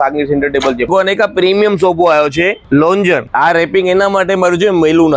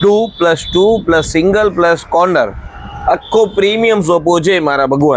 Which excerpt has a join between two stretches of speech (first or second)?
first